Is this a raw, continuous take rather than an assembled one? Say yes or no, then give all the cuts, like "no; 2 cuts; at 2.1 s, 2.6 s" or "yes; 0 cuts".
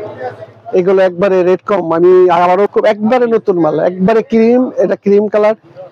no; 1 cut; at 2.7 s